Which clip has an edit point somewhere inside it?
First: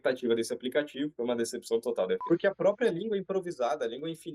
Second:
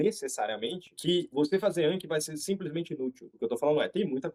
first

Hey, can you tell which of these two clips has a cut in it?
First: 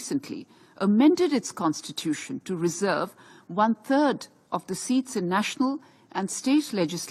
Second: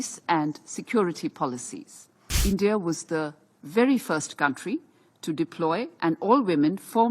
second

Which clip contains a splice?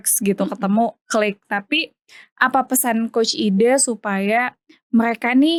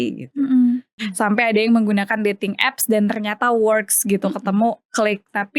second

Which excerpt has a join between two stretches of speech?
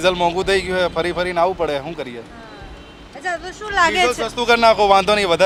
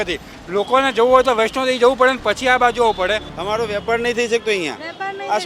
second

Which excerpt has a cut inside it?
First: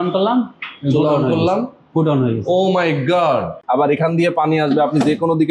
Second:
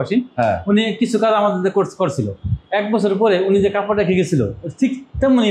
first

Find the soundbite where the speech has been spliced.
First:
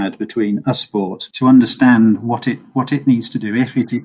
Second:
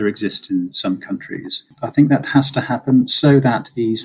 second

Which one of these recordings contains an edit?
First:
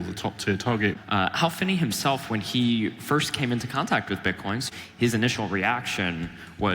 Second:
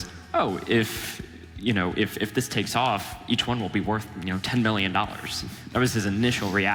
first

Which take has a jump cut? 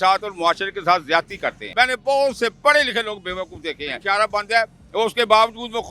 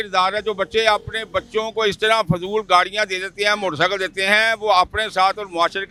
first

